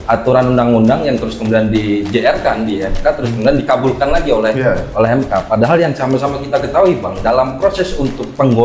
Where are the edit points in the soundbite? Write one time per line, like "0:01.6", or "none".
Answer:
none